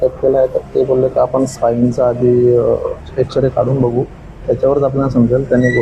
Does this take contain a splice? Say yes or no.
no